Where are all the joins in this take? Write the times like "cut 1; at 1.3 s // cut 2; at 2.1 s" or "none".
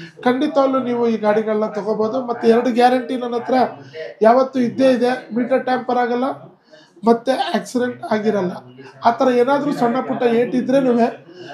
none